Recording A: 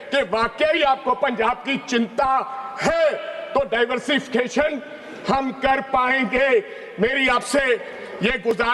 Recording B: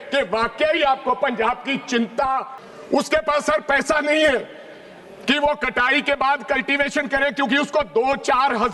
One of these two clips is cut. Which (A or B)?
B